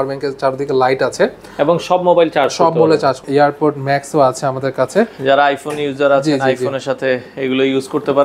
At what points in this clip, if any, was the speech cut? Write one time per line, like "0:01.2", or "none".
0:03.2